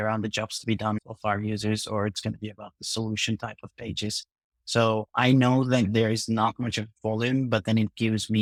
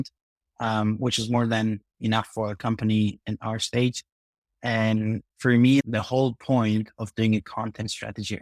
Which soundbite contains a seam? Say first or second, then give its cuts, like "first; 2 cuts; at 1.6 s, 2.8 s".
second; 1 cut; at 5.8 s